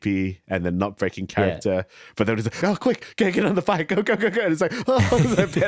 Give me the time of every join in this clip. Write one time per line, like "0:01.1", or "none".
0:02.6